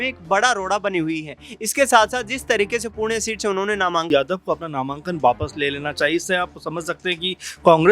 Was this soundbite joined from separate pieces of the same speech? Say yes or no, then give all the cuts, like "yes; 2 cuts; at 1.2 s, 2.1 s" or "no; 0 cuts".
yes; 1 cut; at 4.1 s